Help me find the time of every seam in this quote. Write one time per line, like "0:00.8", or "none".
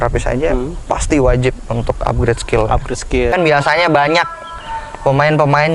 0:03.3